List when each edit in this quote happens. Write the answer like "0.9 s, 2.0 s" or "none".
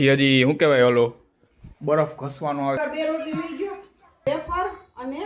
2.8 s, 4.2 s